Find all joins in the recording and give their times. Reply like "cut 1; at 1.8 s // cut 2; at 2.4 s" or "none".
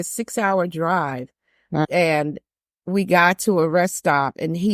cut 1; at 1.8 s